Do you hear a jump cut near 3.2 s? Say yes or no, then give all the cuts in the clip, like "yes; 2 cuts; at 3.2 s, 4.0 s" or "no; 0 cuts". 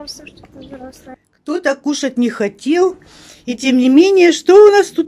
no; 1 cut; at 1.1 s